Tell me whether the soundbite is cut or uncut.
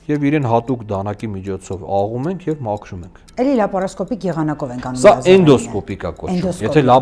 cut